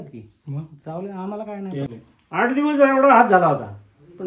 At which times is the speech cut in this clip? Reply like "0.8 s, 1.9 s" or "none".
1.9 s